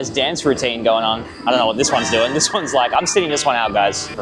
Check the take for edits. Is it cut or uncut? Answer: uncut